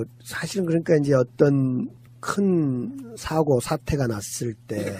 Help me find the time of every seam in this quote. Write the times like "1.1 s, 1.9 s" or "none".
2.9 s